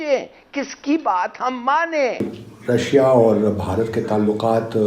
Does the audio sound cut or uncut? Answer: cut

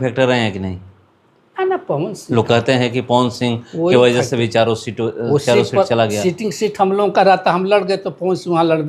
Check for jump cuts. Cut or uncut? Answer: uncut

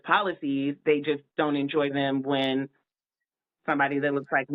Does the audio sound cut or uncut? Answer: uncut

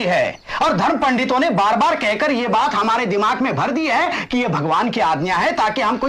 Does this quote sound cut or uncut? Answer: uncut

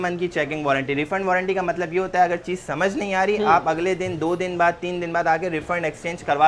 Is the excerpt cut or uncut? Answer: uncut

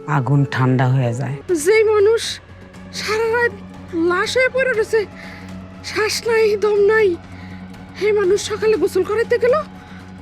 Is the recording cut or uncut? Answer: cut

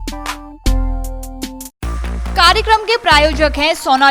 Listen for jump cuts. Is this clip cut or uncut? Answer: uncut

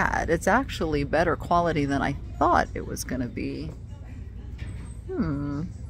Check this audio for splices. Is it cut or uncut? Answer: uncut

